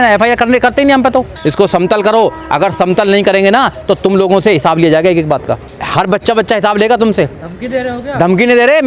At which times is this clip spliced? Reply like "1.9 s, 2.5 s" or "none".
1.3 s, 5.7 s